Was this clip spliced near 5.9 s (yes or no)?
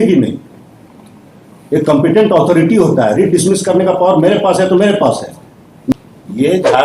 yes